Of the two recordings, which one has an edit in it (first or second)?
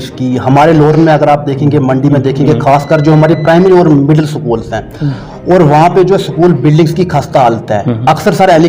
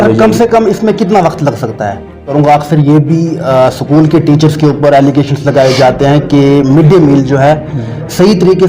second